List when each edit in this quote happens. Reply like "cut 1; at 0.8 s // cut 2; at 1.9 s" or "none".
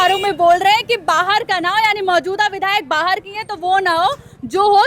none